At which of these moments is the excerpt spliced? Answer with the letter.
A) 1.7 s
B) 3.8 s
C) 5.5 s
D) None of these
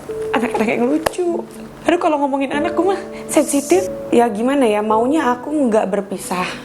B